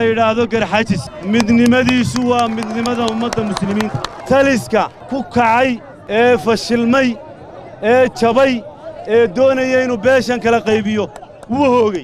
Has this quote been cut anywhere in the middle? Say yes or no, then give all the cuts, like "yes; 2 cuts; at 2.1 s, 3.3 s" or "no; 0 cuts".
yes; 4 cuts; at 1.1 s, 4.1 s, 5.0 s, 5.9 s